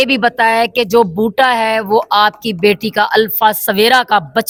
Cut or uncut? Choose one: uncut